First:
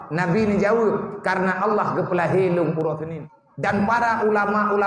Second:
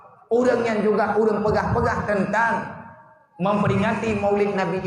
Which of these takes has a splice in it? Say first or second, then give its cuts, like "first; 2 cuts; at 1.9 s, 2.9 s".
first; 1 cut; at 3.1 s